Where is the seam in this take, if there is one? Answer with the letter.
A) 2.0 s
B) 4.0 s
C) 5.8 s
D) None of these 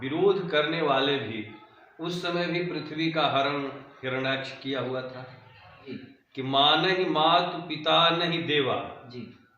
C